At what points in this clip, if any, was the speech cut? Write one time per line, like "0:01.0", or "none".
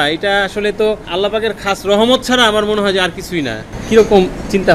0:03.7